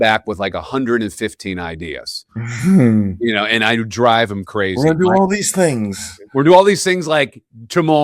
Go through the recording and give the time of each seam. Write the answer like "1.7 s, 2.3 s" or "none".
none